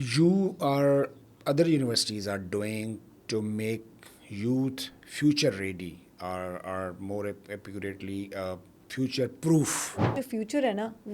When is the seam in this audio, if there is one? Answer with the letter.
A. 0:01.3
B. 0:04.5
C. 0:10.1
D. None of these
C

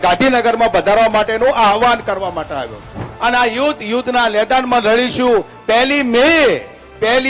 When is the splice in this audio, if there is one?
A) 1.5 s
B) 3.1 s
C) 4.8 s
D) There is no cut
B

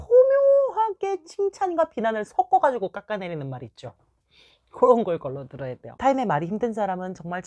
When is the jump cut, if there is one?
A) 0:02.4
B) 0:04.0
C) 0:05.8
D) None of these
C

